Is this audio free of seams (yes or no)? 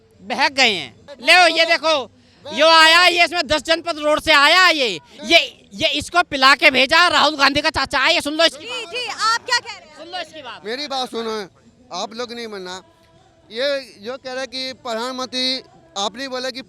yes